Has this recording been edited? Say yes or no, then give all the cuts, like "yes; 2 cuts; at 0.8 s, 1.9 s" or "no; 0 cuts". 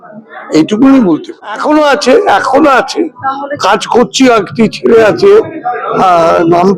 yes; 1 cut; at 1.6 s